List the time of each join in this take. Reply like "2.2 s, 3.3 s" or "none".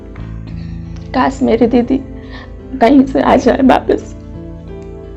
1.1 s, 4.0 s